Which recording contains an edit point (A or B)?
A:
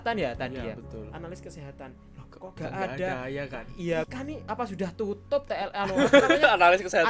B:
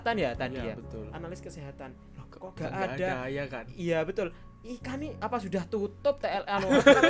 A